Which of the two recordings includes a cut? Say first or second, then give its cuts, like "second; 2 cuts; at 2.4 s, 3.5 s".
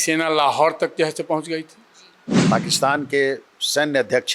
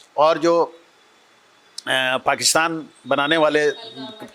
first; 1 cut; at 2.3 s